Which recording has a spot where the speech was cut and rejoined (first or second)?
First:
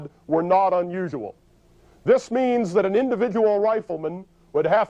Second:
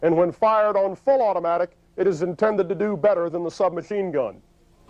first